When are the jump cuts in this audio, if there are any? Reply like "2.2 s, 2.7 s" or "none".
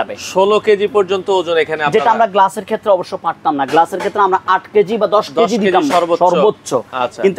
none